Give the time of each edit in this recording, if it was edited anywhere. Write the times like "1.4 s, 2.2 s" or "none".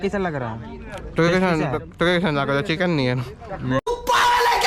none